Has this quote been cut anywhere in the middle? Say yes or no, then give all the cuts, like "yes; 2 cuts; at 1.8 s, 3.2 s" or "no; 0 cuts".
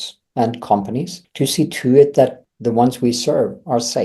yes; 2 cuts; at 1.2 s, 2.4 s